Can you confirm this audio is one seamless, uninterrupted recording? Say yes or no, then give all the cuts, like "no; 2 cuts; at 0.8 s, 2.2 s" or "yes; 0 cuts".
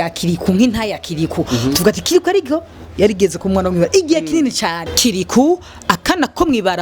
no; 1 cut; at 4.8 s